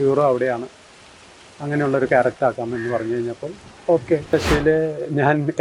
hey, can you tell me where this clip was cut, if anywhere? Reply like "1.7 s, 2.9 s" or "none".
4.3 s

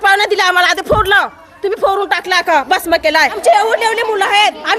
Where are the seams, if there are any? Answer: 3.4 s

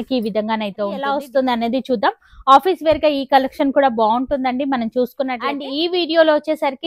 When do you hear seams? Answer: 1.2 s, 5.6 s

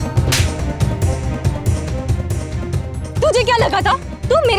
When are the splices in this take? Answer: 3.2 s

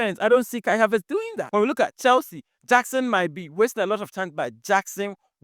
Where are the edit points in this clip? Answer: 1.4 s

